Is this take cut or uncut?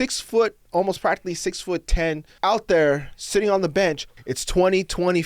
cut